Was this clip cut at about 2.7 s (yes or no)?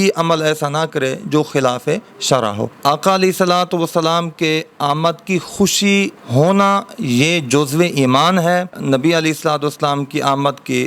yes